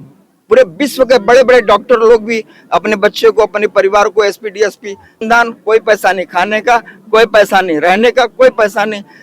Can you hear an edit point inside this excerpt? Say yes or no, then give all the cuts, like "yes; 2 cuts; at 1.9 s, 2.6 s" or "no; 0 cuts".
yes; 1 cut; at 5.2 s